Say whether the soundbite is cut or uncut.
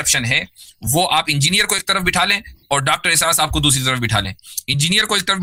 uncut